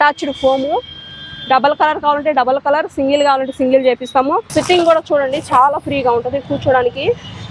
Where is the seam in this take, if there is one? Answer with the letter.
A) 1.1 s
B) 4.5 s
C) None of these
B